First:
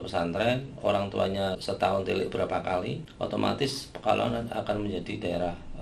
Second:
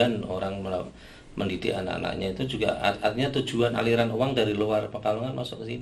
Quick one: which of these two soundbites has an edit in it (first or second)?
first